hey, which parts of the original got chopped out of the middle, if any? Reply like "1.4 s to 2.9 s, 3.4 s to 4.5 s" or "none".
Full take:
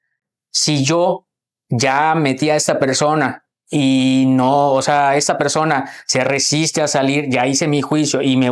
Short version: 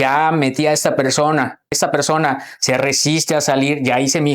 3.6 s to 5.2 s